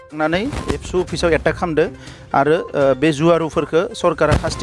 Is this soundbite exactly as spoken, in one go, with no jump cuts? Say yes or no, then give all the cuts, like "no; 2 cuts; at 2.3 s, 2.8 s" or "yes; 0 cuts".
yes; 0 cuts